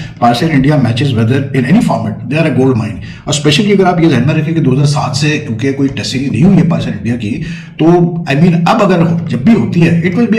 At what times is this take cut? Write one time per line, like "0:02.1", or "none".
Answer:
none